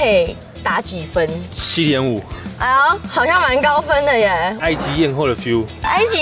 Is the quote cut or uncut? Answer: uncut